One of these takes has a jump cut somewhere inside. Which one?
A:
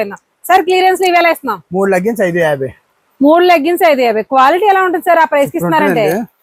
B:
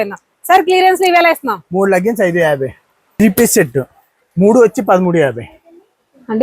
B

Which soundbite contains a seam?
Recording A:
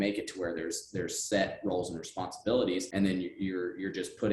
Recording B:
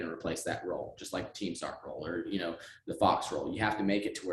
A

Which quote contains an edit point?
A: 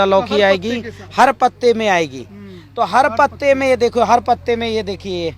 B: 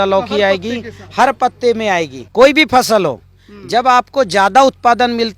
B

